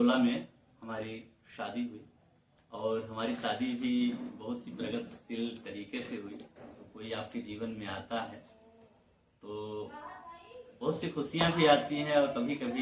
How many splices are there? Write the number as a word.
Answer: one